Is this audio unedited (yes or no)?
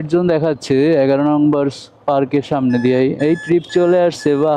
yes